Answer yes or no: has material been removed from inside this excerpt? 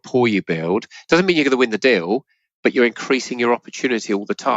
no